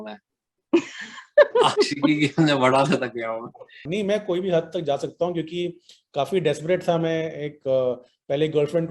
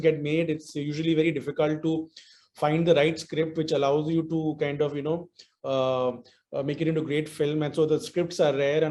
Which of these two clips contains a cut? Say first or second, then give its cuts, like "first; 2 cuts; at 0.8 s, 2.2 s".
first; 1 cut; at 3.9 s